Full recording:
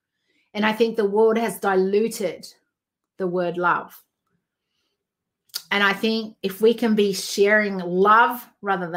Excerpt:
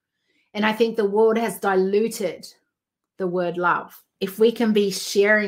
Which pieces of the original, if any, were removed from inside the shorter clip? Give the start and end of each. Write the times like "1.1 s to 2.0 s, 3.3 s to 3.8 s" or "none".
4.1 s to 6.3 s